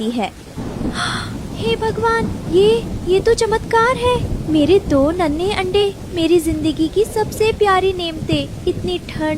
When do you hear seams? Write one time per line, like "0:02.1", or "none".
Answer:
none